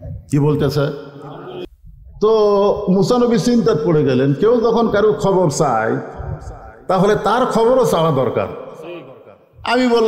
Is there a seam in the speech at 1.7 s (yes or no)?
yes